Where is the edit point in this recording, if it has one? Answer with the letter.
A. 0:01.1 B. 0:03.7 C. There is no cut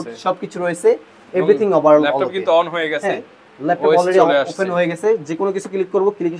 C